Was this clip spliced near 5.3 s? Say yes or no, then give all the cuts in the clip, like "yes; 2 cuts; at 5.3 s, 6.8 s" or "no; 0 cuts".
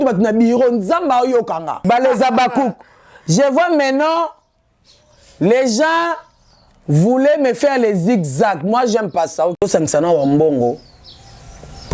no; 2 cuts; at 1.8 s, 9.6 s